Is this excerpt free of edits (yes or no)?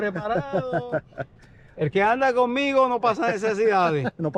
yes